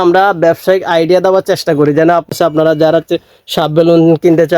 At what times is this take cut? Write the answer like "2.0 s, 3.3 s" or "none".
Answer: 2.3 s